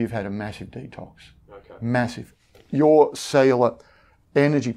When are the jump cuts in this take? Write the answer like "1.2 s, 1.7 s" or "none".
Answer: 2.2 s